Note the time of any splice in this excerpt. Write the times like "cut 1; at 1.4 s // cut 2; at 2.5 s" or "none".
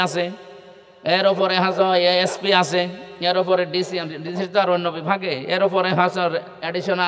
none

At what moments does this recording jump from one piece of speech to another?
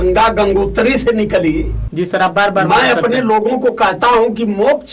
cut 1; at 1.8 s

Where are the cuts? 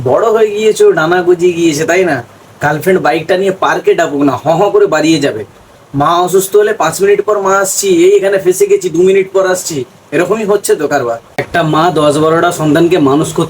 cut 1; at 11.2 s

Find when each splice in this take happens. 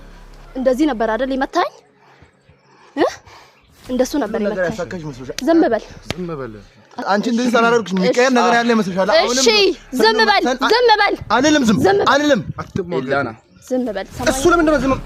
none

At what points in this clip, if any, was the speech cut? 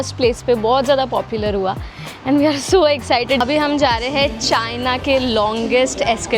cut 1; at 3.4 s

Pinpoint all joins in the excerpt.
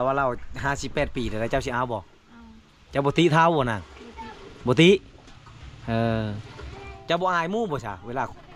none

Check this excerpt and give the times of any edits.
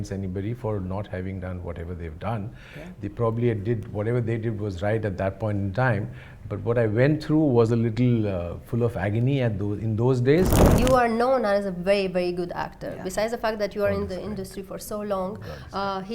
cut 1; at 10.7 s

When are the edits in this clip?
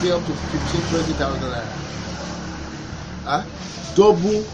none

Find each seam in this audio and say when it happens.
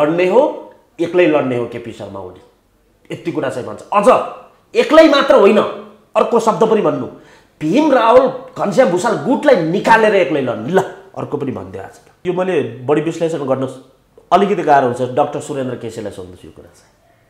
cut 1; at 12.0 s

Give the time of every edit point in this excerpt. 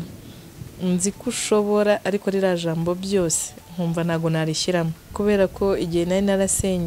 cut 1; at 5.0 s

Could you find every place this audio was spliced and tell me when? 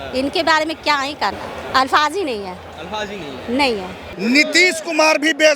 cut 1; at 1.5 s // cut 2; at 4.1 s

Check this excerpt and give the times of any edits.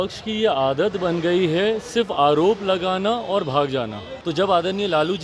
cut 1; at 4.1 s

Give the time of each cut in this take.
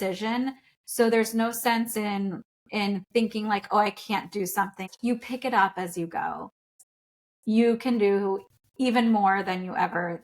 cut 1; at 4.9 s // cut 2; at 6.8 s

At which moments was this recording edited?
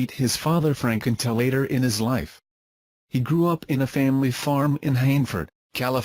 none

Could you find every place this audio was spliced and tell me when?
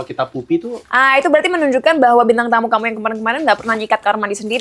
cut 1; at 0.9 s

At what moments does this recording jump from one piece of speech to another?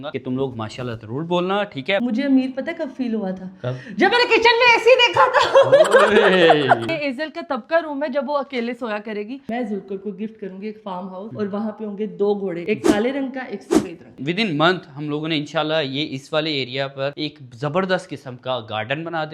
cut 1; at 2.0 s // cut 2; at 6.8 s // cut 3; at 9.5 s // cut 4; at 14.2 s

